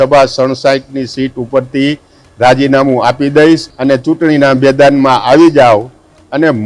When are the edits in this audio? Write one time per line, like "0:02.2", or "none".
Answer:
0:03.7